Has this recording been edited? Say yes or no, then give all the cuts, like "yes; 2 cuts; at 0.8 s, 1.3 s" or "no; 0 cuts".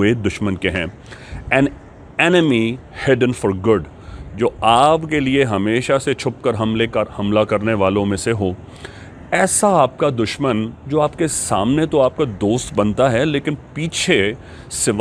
no; 0 cuts